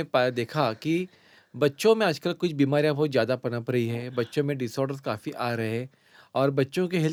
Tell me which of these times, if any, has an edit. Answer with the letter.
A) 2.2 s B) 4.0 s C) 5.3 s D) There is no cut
D